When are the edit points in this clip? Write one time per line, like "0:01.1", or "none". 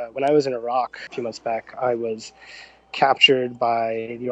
0:01.0

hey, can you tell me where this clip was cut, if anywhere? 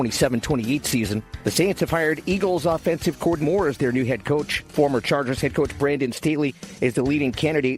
0:03.4

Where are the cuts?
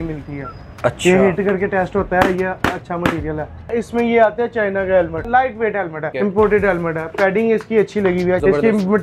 0:03.7
0:05.5

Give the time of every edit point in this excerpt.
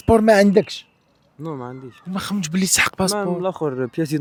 none

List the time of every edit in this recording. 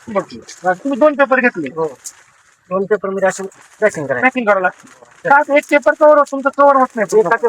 none

